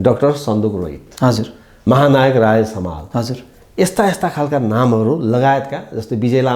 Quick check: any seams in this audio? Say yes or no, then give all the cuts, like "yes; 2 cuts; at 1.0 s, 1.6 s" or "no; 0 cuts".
no; 0 cuts